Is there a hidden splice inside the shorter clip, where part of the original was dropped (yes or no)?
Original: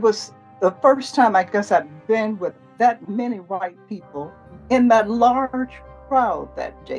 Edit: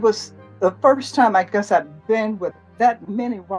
no